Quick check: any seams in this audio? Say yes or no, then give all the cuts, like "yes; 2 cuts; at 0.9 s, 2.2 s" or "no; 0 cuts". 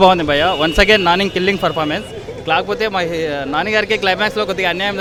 no; 0 cuts